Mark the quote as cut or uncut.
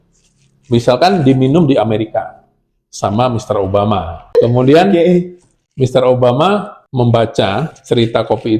cut